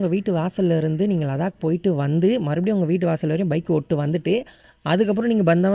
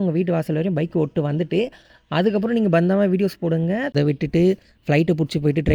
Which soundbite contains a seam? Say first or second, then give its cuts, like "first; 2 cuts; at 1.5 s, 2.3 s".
second; 1 cut; at 3.9 s